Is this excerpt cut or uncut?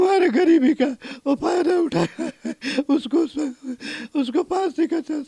uncut